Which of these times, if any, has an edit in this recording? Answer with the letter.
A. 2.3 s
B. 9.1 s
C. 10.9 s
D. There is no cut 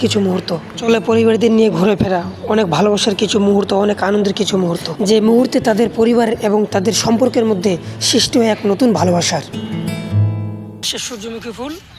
C